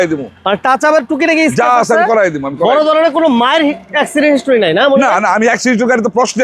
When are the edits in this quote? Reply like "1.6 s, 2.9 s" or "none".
none